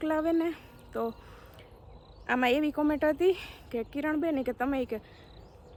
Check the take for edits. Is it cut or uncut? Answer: uncut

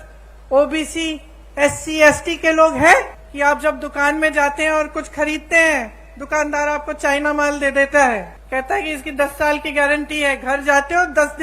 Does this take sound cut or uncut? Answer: cut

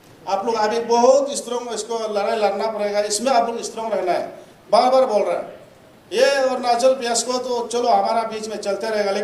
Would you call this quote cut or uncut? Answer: uncut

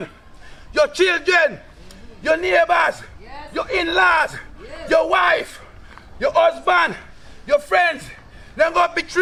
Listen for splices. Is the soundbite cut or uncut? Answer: uncut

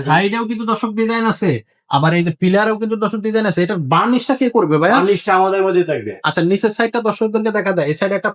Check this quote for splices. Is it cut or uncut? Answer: uncut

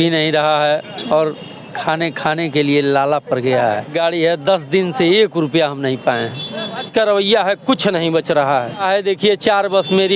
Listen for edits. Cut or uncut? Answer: cut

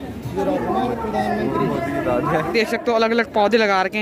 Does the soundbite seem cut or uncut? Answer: uncut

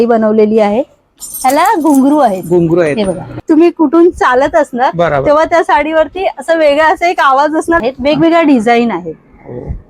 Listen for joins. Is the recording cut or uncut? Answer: cut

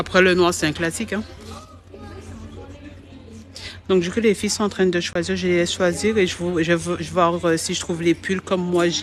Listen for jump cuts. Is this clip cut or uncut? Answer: uncut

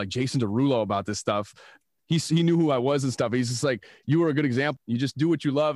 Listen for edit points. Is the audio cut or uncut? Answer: cut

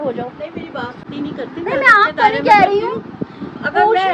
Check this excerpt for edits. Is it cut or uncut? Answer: cut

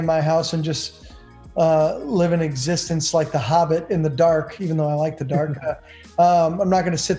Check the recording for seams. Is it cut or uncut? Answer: uncut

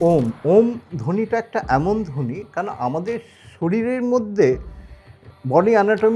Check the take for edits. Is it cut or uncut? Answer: uncut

